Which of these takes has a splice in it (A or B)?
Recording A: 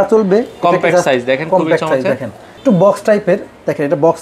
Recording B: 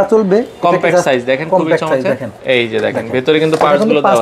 B